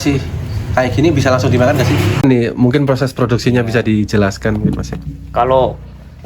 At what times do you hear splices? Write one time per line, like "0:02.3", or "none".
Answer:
0:02.2